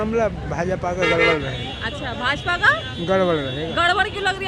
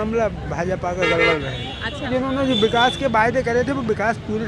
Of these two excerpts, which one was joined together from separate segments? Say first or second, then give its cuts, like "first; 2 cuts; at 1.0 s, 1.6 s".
second; 1 cut; at 2.0 s